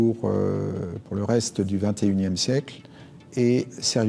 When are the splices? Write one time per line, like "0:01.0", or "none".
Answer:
none